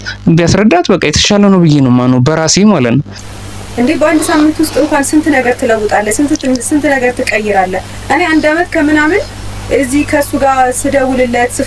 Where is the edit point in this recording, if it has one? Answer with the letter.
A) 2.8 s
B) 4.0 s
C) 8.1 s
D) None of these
D